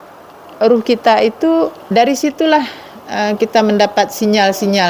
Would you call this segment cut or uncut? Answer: cut